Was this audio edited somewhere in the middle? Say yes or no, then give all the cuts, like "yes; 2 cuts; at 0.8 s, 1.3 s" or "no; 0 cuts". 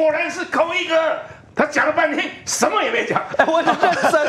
no; 0 cuts